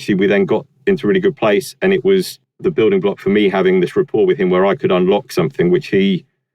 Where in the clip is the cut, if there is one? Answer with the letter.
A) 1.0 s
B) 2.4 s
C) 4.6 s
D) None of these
B